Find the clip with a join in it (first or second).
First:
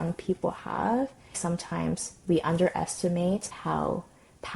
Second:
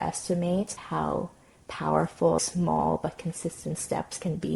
first